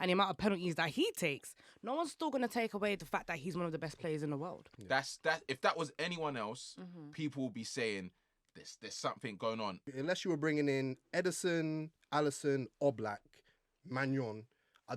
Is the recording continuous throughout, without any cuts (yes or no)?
no